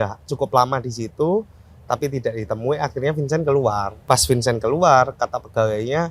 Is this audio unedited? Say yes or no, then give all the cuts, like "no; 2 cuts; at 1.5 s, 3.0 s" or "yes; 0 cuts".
no; 1 cut; at 3.9 s